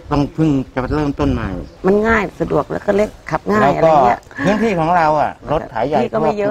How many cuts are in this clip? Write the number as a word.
one